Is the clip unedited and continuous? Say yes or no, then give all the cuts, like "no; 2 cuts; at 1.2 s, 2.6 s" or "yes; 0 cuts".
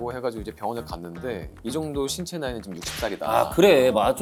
yes; 0 cuts